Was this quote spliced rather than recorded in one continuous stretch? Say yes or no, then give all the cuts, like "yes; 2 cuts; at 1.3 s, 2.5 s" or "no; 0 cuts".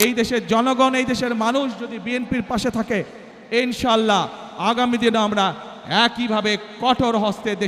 no; 0 cuts